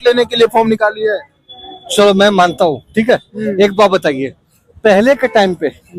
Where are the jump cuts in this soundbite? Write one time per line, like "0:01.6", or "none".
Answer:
none